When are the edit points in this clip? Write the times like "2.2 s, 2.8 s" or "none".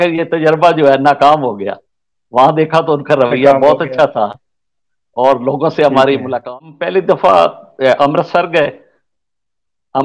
6.3 s